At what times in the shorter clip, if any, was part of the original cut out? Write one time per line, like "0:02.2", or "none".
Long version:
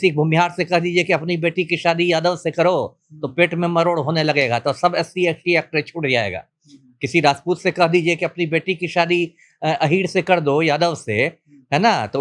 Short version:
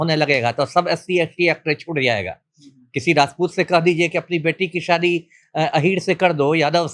none